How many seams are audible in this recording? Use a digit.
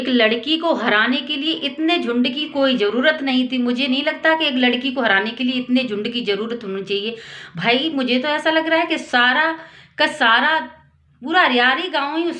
0